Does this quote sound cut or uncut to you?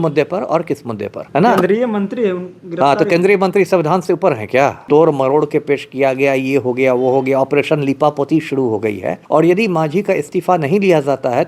cut